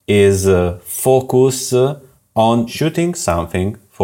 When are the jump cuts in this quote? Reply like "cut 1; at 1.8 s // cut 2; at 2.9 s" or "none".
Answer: cut 1; at 2.7 s